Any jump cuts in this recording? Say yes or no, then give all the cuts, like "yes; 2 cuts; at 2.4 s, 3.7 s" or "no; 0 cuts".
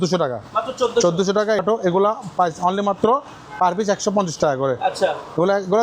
yes; 1 cut; at 1.6 s